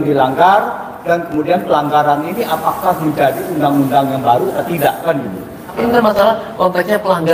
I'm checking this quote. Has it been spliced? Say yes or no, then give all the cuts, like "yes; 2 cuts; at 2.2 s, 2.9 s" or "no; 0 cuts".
yes; 1 cut; at 5.8 s